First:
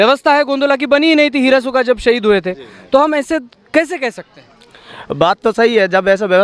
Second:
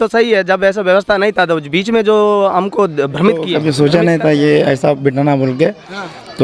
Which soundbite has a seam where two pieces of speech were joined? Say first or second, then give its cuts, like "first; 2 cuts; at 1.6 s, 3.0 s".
second; 1 cut; at 3.5 s